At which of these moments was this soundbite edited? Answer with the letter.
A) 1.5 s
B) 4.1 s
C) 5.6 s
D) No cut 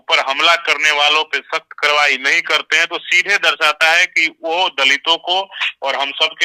D